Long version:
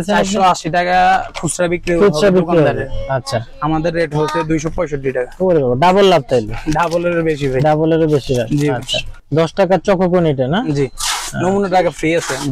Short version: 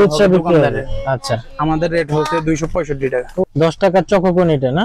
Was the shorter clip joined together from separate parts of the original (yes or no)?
yes